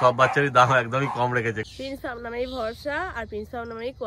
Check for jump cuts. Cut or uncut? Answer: cut